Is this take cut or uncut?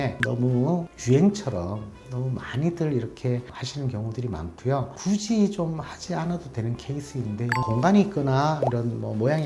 cut